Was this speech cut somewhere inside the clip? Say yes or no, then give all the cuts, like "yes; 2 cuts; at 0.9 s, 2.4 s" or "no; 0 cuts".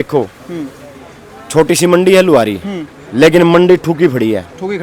no; 0 cuts